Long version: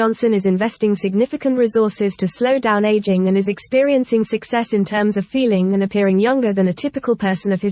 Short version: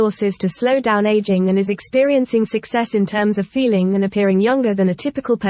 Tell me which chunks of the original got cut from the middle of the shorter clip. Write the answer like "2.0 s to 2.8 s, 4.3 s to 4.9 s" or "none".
none